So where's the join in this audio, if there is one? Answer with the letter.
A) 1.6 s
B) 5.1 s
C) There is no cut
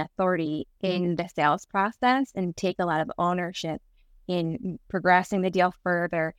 C